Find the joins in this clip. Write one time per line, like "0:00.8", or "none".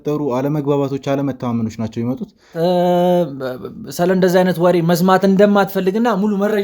0:02.5